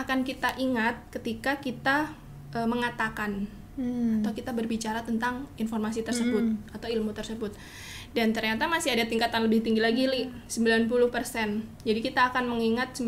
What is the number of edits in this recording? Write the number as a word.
zero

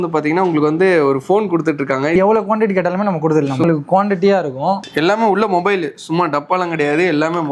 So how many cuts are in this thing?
three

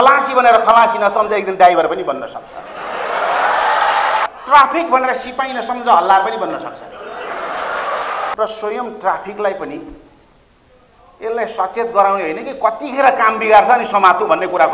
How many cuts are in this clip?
two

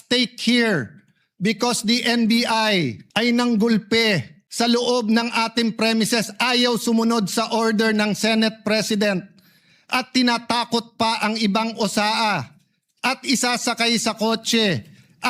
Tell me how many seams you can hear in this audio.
two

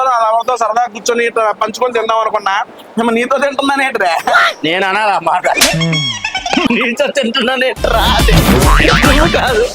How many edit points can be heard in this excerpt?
zero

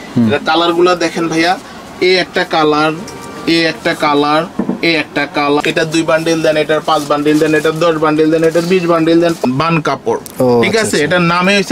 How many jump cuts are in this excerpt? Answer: two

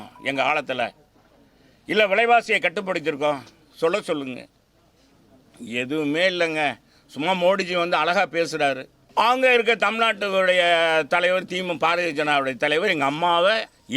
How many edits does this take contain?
one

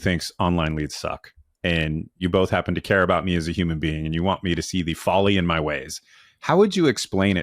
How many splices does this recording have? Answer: one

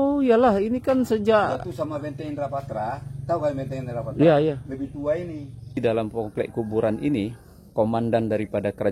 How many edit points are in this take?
one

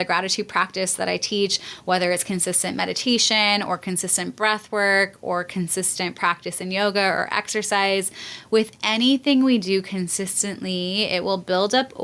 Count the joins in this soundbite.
zero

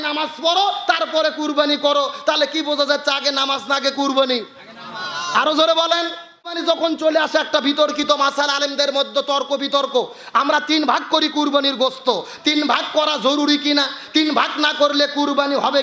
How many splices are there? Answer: one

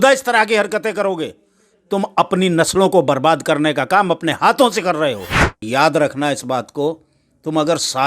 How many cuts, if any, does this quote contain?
one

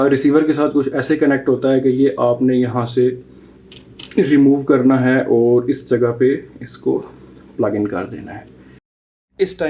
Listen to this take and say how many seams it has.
one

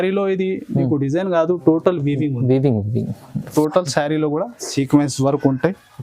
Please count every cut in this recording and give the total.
one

